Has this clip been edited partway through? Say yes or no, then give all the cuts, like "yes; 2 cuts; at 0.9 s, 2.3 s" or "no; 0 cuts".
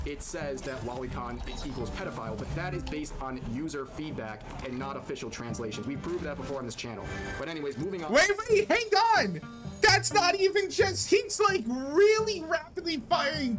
no; 0 cuts